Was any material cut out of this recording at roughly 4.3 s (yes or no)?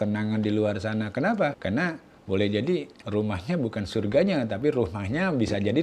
no